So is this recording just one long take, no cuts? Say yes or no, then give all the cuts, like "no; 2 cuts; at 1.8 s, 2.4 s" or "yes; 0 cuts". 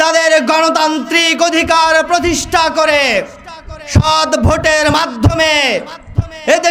yes; 0 cuts